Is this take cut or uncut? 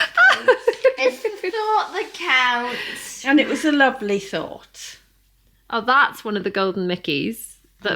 uncut